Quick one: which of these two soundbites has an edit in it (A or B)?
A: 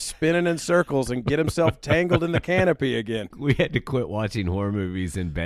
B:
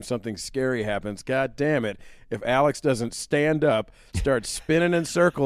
A